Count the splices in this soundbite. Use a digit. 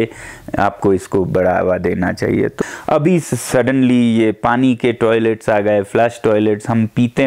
1